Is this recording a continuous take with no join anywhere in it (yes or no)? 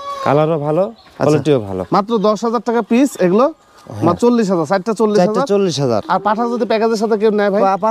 yes